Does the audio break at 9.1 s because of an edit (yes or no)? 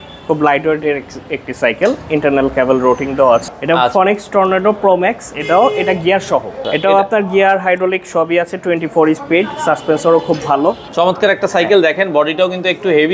no